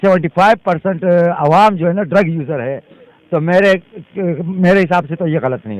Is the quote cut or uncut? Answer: uncut